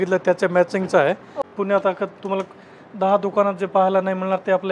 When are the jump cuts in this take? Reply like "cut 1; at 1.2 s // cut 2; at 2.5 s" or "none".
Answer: cut 1; at 1.5 s